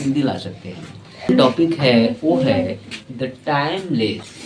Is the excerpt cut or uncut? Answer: cut